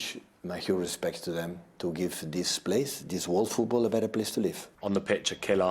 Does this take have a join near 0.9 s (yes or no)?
no